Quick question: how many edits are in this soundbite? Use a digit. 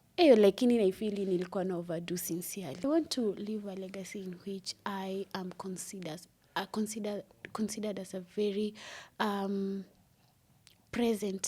1